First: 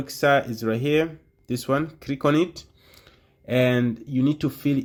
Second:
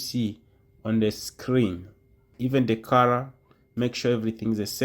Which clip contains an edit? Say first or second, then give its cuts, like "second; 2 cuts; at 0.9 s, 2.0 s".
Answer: second; 1 cut; at 2.3 s